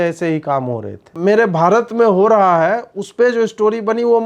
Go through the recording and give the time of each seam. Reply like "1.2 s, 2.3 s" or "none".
1.1 s